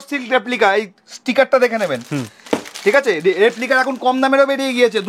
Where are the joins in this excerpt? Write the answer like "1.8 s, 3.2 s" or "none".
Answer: none